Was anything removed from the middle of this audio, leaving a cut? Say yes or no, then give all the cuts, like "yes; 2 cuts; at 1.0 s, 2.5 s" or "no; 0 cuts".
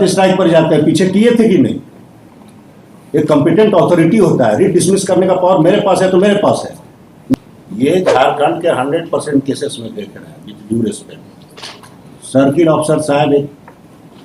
yes; 1 cut; at 7.3 s